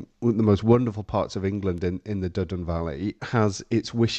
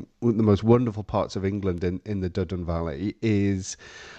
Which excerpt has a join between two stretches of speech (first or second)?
first